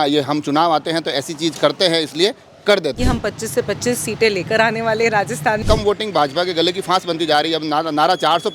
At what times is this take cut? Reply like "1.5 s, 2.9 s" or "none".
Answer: 3.0 s, 5.6 s

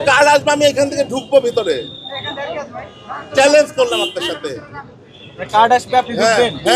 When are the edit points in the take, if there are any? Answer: none

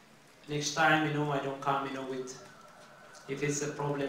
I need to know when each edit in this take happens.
none

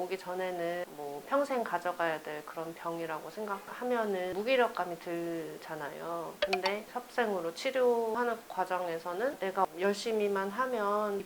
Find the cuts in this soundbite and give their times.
0.9 s, 4.3 s, 8.1 s

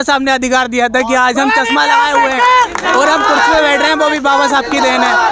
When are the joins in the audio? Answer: none

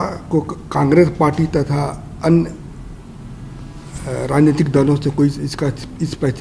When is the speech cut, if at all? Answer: none

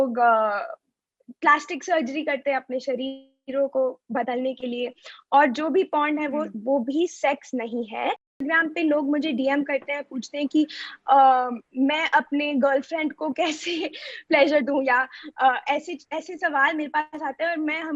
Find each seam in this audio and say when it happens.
8.4 s

